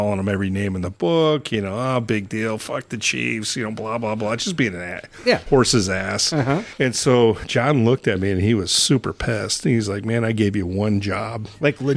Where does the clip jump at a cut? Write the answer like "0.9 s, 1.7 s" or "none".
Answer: none